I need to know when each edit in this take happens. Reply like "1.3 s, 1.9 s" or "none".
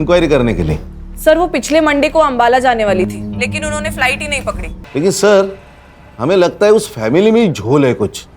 4.7 s